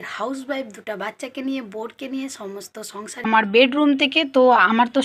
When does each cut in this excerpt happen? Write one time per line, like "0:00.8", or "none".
0:03.3

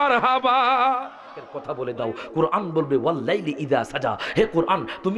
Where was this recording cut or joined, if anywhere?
0:01.6

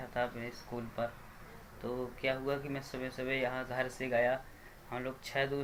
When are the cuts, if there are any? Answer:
none

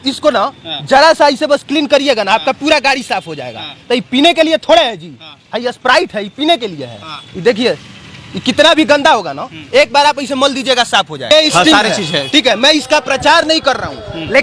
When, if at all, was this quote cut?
0:11.3

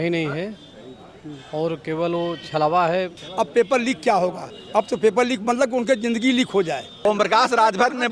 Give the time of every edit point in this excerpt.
0:03.2
0:07.0

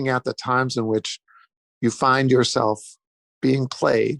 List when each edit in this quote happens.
none

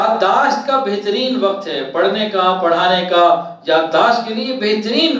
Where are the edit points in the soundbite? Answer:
none

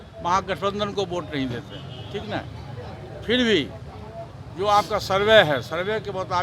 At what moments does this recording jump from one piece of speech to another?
none

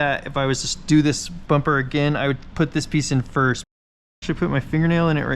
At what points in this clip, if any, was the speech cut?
0:03.8

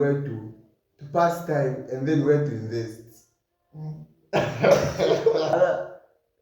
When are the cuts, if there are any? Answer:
0:05.5

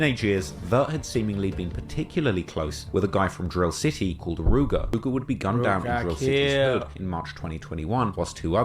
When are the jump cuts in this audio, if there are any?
0:04.9

